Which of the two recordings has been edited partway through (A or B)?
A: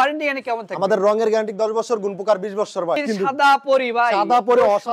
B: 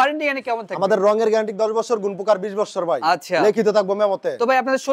A